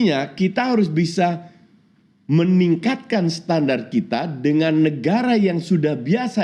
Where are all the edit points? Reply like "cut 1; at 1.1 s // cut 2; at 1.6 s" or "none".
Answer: none